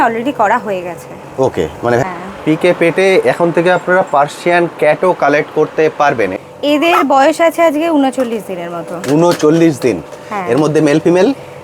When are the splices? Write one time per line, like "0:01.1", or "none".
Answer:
0:02.1
0:06.3